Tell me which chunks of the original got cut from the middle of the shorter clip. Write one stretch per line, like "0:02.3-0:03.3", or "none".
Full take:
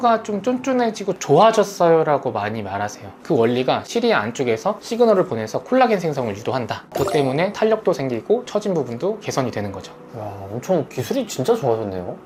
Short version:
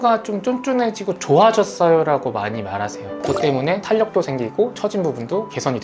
0:03.1-0:06.8